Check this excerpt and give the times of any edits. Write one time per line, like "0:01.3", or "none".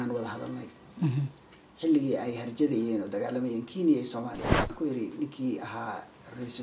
0:04.7

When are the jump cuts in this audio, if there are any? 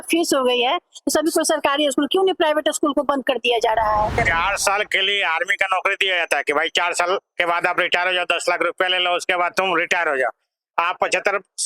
0:04.2

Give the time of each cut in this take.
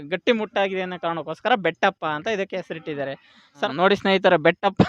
0:03.7

